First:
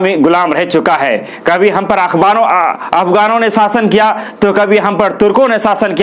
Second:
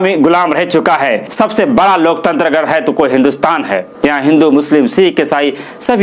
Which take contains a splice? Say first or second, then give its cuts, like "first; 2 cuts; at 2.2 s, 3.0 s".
second; 1 cut; at 1.2 s